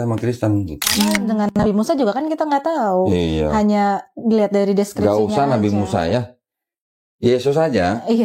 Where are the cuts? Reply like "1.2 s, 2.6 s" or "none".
1.2 s